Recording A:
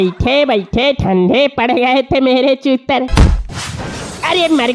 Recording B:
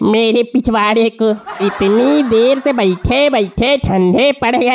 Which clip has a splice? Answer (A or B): A